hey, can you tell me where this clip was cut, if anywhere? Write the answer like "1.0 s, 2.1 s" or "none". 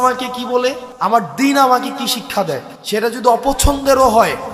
0.9 s, 2.7 s